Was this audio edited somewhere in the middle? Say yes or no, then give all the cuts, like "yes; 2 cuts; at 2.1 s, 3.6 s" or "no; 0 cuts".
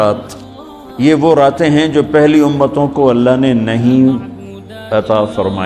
no; 0 cuts